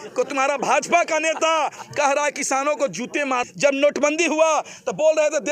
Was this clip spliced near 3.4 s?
yes; 1 cut; at 3.4 s

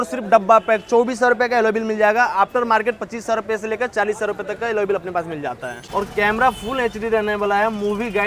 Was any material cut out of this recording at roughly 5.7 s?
yes; 1 cut; at 5.7 s

